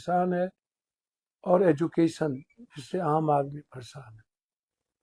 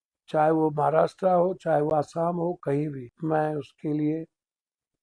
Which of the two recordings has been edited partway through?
second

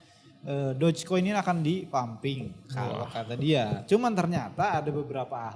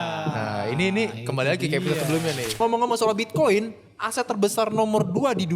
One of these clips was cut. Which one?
second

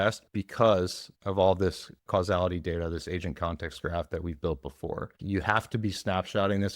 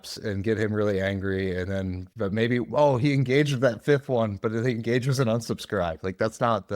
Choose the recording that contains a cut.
first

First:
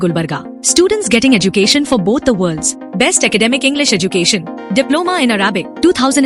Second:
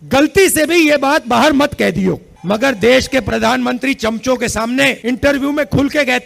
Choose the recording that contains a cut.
second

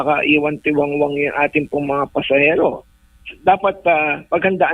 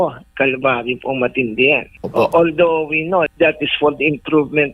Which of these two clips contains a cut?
second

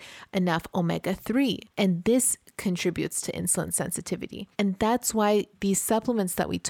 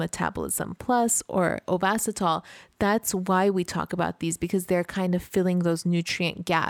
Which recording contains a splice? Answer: first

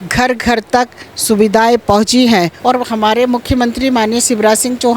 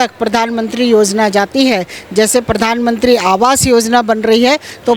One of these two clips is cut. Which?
first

